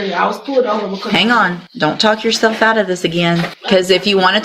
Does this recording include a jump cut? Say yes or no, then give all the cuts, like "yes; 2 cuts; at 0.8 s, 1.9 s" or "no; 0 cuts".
yes; 2 cuts; at 1.6 s, 3.6 s